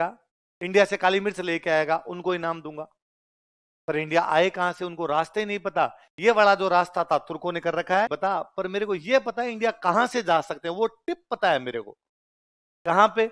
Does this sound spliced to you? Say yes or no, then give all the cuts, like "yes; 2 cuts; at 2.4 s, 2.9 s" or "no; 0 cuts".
yes; 1 cut; at 8.1 s